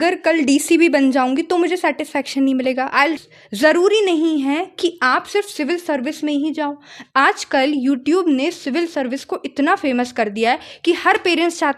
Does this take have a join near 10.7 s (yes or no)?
no